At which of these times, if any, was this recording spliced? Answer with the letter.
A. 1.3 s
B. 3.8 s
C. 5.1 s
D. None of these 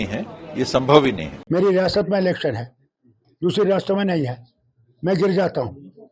A